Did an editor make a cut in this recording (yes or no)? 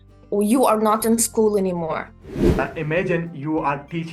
yes